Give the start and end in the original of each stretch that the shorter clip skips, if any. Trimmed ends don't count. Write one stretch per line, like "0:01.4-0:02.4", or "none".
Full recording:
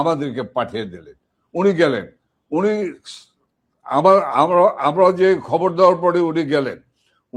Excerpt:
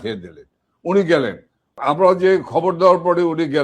0:02.5-0:04.8

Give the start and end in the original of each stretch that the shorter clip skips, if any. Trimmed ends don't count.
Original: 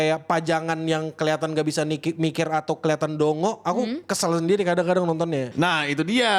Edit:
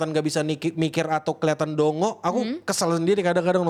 none

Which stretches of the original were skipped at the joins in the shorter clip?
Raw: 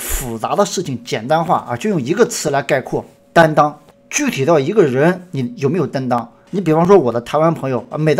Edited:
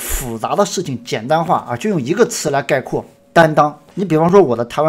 0:03.9-0:06.4

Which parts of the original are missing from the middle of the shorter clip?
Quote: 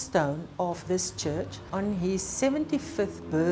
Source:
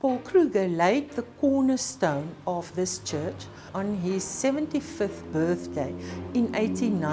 0:03.5-0:03.6

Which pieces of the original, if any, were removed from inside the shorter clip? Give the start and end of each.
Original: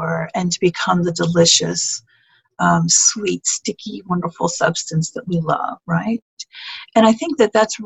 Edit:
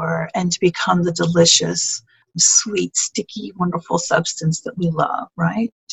0:02.5-0:03.0

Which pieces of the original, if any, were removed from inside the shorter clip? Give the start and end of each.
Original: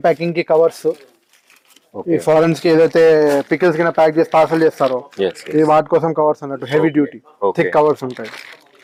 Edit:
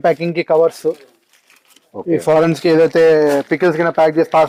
none

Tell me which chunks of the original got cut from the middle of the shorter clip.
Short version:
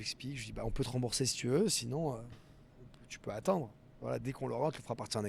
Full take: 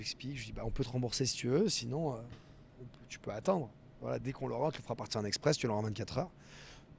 none

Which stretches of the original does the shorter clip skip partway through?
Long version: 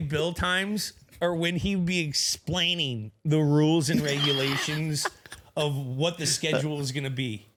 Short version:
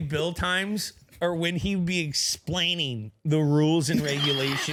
none

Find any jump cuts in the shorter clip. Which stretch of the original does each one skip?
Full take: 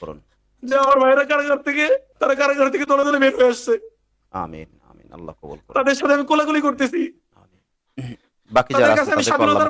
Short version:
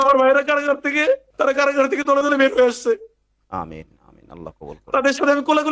none

